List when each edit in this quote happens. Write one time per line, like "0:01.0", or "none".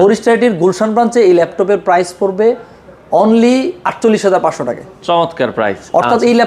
none